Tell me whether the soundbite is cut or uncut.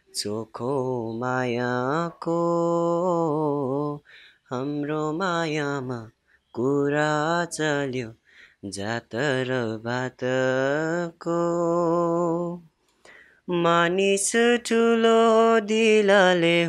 uncut